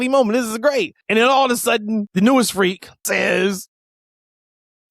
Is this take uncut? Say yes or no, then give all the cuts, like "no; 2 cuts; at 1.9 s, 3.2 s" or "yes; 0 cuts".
no; 3 cuts; at 1.0 s, 2.1 s, 3.0 s